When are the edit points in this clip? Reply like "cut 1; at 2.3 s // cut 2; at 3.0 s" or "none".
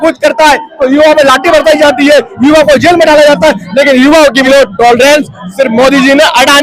cut 1; at 4.4 s